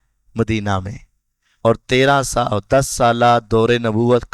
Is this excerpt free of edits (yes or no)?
yes